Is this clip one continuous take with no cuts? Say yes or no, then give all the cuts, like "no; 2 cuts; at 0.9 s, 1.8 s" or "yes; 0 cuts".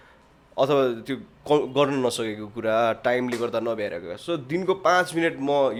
yes; 0 cuts